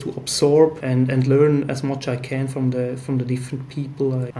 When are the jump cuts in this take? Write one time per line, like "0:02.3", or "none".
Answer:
none